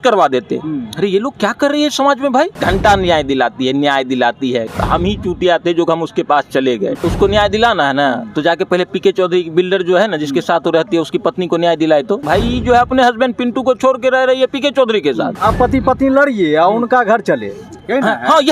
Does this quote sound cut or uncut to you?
cut